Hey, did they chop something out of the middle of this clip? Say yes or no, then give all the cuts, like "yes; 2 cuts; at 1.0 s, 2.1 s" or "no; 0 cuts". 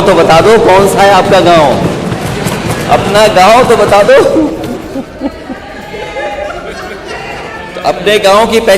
yes; 2 cuts; at 2.2 s, 7.6 s